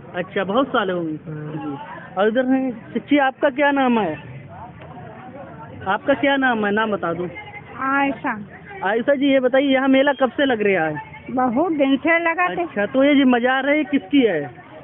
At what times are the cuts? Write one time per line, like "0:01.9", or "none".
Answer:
none